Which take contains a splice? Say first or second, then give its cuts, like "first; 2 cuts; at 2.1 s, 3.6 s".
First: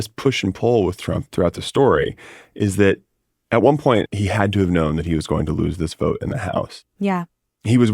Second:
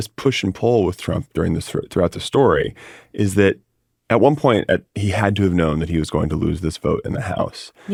first; 2 cuts; at 1.3 s, 4.1 s